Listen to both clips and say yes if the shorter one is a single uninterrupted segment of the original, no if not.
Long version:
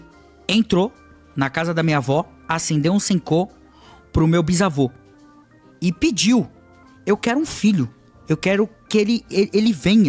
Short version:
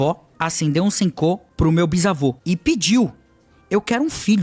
no